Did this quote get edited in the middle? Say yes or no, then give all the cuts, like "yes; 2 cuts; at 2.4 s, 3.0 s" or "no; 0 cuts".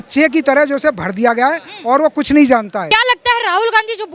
yes; 1 cut; at 2.8 s